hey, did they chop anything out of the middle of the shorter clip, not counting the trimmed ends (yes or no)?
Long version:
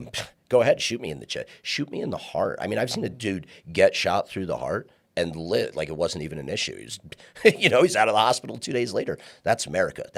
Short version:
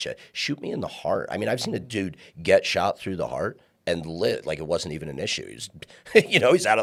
no